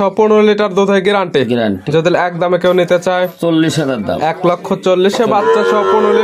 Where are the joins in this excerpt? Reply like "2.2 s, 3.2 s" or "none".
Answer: none